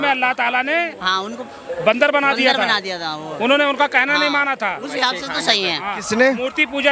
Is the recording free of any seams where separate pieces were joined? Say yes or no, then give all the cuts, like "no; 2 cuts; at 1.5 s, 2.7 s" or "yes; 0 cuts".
yes; 0 cuts